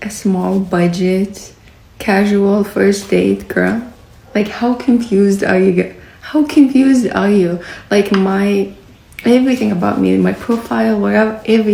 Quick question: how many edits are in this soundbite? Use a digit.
0